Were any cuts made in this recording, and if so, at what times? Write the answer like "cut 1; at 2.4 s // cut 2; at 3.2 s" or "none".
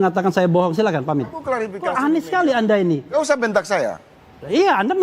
cut 1; at 1.7 s